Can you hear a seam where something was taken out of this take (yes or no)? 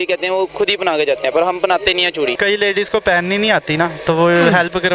yes